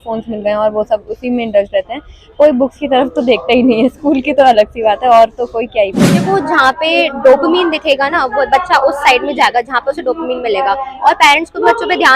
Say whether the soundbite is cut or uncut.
cut